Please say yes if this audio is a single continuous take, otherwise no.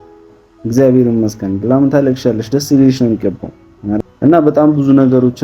no